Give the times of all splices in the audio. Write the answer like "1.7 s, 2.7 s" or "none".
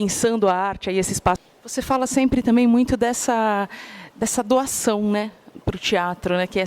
1.4 s